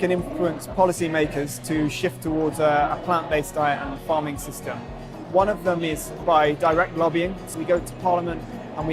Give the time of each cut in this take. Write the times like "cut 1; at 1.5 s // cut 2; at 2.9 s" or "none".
cut 1; at 5.1 s // cut 2; at 7.4 s